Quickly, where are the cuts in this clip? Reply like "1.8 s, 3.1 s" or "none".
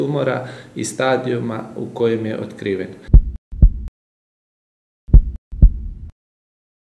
3.0 s